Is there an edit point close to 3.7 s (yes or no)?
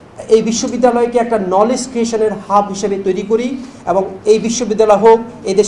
no